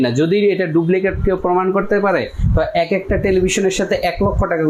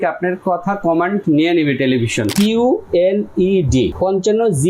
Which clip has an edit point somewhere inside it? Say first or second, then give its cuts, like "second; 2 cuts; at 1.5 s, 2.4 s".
second; 2 cuts; at 2.3 s, 3.9 s